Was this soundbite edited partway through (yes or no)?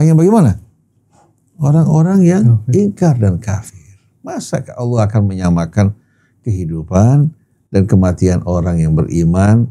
no